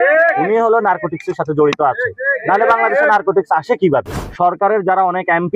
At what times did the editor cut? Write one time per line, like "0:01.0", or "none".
0:04.1